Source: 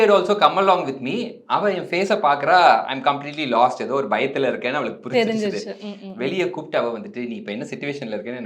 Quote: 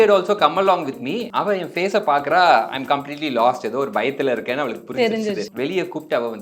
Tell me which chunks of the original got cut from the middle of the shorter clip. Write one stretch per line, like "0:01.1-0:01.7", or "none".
0:01.2-0:01.4
0:05.7-0:06.1